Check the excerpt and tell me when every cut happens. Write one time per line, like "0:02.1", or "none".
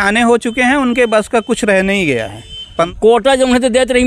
0:02.9

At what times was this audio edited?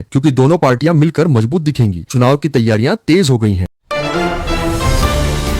0:03.8

